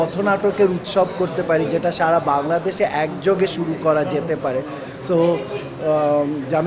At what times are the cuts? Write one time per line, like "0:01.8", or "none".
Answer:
none